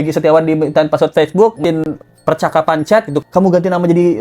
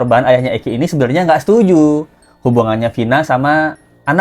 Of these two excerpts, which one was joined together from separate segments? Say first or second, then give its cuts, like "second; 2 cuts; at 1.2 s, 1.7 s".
first; 2 cuts; at 1.6 s, 3.1 s